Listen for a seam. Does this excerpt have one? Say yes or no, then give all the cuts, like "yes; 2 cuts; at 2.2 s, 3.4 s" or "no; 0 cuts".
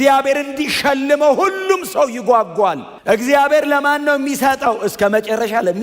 yes; 1 cut; at 2.9 s